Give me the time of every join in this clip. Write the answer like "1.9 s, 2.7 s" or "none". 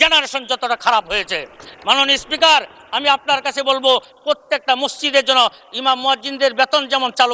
none